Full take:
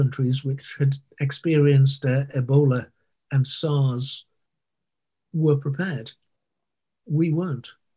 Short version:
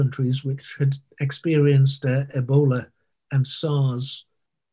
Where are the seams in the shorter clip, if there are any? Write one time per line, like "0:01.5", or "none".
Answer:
none